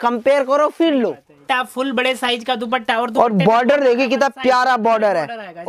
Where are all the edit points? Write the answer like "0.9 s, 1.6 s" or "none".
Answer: 1.4 s